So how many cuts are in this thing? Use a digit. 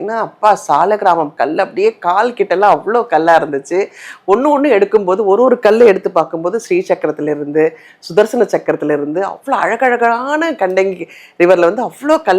0